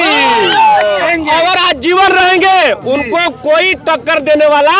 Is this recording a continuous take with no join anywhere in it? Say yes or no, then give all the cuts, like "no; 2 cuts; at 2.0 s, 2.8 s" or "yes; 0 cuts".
no; 1 cut; at 1.1 s